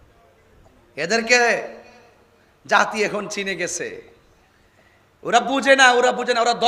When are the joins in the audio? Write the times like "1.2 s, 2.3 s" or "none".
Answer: none